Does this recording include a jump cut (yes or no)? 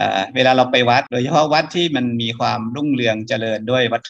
yes